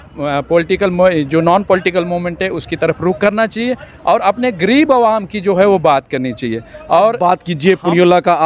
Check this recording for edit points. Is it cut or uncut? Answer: cut